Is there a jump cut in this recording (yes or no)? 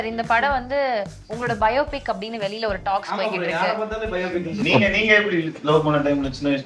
yes